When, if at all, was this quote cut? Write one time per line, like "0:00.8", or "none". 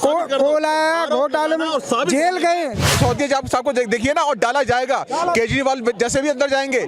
0:02.9

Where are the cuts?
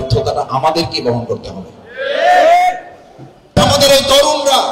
0:03.5

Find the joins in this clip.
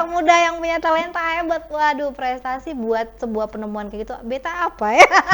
none

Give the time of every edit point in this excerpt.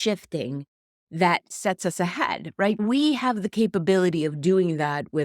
0:02.8

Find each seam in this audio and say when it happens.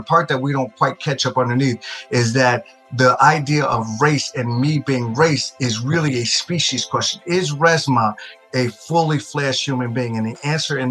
none

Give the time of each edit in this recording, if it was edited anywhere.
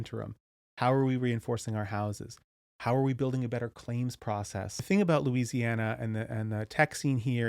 0:04.8

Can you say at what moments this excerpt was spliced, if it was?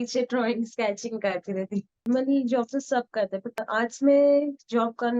0:02.0
0:03.6

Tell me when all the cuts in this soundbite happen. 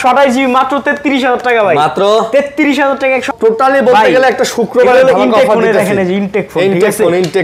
0:03.3

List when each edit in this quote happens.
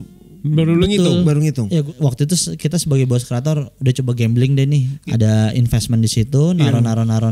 0:01.8
0:04.9

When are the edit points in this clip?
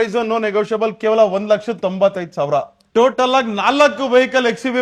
0:02.8

